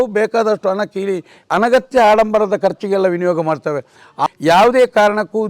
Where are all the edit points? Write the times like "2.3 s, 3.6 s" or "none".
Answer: 4.3 s